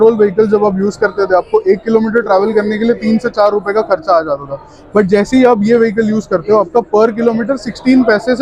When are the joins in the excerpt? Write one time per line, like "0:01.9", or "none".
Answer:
none